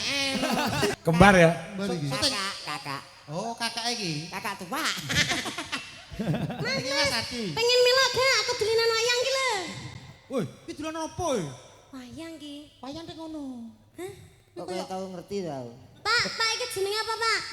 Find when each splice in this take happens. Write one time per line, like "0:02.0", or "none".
0:00.9